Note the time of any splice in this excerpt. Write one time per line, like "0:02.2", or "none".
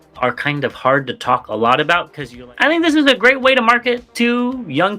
0:02.2